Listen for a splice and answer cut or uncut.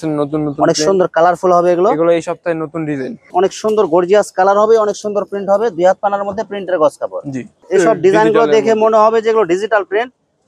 cut